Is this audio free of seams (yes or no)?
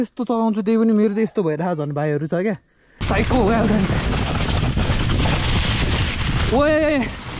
no